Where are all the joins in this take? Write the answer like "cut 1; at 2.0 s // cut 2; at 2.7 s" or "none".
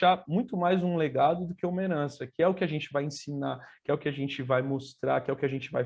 none

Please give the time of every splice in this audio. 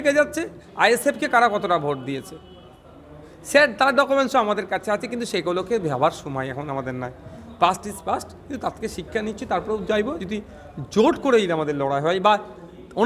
none

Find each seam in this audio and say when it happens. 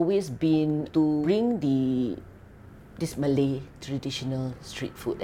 none

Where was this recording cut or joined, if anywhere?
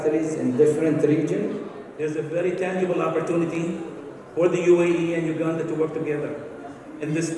cut 1; at 1.8 s

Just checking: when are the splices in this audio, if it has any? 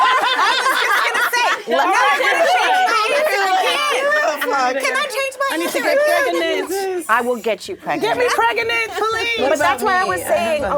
none

